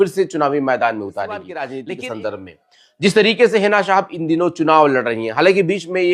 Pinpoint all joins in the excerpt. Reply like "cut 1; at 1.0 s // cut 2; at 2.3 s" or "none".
cut 1; at 1.7 s